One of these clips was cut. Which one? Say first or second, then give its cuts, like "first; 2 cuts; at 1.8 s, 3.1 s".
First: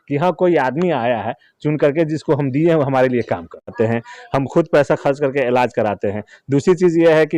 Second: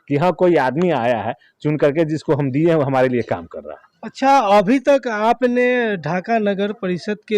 first; 1 cut; at 3.7 s